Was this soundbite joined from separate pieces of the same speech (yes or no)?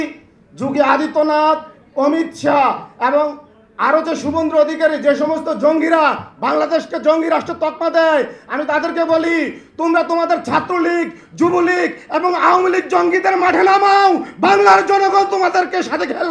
no